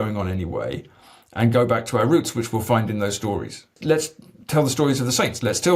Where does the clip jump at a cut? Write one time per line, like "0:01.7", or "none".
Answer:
0:03.8